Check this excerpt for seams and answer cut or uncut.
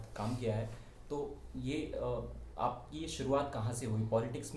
uncut